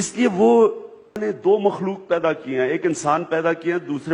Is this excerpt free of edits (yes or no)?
no